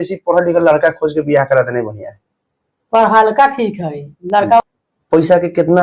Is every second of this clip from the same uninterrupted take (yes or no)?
no